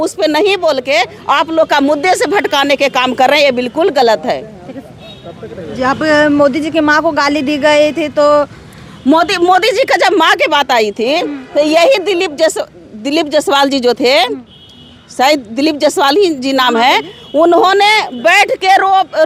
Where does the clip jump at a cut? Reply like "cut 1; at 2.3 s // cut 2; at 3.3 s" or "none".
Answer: none